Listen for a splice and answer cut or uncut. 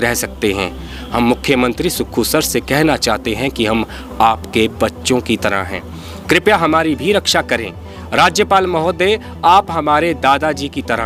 uncut